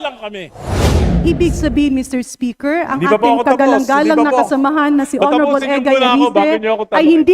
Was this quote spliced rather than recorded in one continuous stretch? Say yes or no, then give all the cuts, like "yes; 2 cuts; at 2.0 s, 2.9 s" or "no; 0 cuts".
yes; 1 cut; at 1.0 s